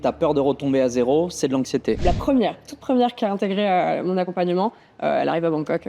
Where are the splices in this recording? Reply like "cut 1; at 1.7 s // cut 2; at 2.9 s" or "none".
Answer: cut 1; at 2.0 s